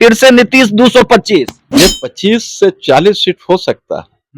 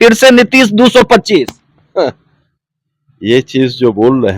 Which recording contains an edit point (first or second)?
first